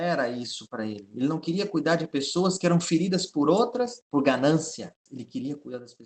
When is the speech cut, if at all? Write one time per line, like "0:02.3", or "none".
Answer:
0:04.0
0:05.0